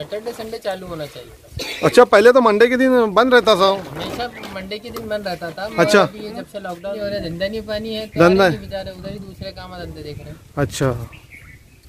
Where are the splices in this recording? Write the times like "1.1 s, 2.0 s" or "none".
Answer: 7.0 s

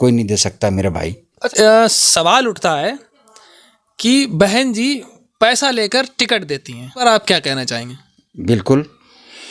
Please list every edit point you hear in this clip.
1.4 s, 7.0 s

